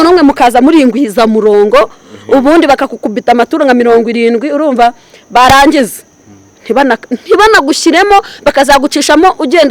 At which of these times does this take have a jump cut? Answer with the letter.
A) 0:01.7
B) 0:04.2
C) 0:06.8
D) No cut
D